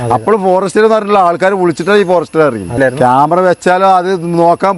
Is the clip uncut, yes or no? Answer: no